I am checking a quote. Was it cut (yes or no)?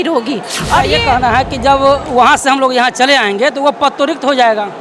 yes